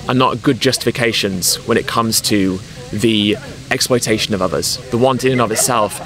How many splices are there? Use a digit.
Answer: 1